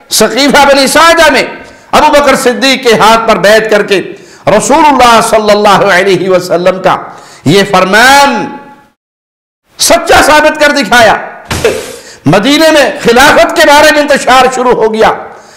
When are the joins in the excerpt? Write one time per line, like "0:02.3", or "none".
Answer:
0:11.6